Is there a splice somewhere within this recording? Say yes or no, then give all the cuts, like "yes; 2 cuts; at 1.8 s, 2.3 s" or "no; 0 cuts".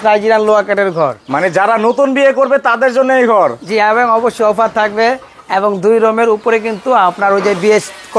no; 0 cuts